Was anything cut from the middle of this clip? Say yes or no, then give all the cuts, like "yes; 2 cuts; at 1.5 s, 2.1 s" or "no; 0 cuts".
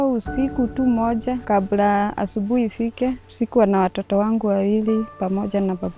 yes; 2 cuts; at 1.4 s, 3.3 s